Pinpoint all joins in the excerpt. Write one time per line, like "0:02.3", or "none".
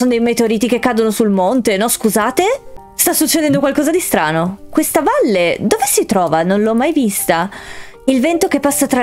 none